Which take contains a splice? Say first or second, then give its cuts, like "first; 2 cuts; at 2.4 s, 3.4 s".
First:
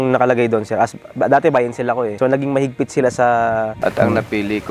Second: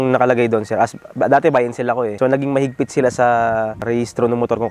first; 1 cut; at 3.7 s